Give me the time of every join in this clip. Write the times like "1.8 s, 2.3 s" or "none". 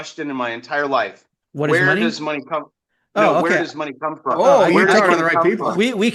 3.4 s